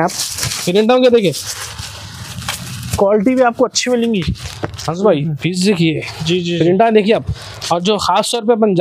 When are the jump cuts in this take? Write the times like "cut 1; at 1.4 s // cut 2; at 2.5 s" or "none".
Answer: none